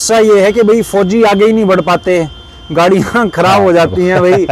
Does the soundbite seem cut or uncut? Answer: uncut